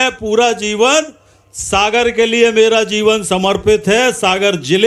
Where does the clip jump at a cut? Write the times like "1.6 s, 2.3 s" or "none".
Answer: none